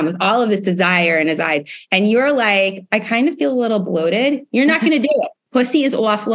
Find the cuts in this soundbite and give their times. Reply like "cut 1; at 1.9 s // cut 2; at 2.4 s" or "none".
cut 1; at 5.4 s

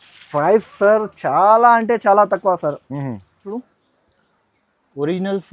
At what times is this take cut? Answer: cut 1; at 3.6 s

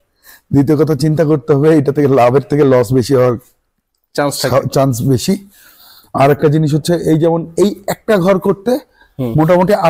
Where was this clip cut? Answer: none

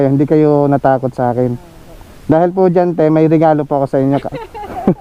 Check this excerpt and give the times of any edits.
none

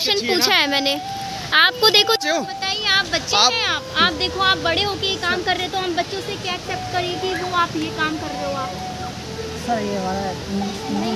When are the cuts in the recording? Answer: cut 1; at 2.2 s

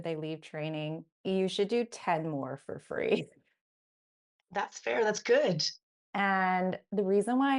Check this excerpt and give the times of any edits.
none

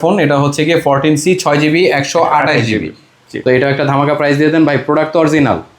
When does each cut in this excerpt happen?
cut 1; at 3.3 s

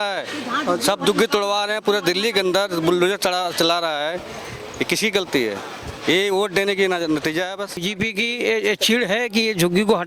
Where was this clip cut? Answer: cut 1; at 7.9 s

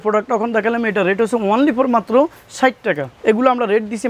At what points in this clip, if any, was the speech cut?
cut 1; at 3.1 s

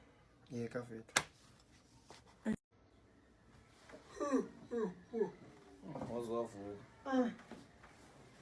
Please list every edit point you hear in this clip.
cut 1; at 2.7 s

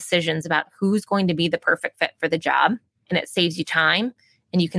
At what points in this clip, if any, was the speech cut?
cut 1; at 2.9 s

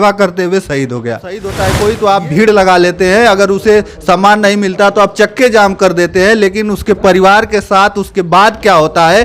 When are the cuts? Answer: cut 1; at 1.7 s

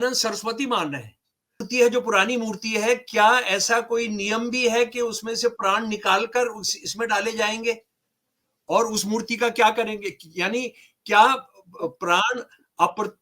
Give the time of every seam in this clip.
cut 1; at 1.6 s

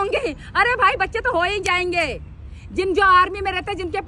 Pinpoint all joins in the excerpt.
none

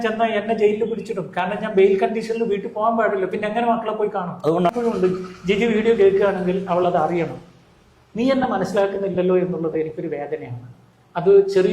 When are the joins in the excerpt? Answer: cut 1; at 4.7 s

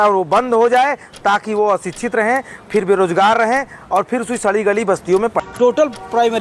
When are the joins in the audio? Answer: cut 1; at 5.4 s

